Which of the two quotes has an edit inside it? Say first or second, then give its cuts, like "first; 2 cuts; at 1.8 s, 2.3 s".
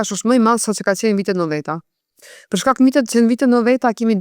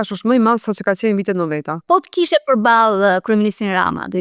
second; 1 cut; at 1.7 s